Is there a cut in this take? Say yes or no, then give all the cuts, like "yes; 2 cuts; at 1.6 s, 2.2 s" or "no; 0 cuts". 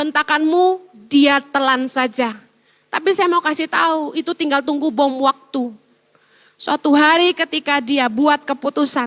no; 0 cuts